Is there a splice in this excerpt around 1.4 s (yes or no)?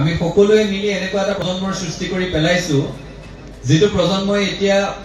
yes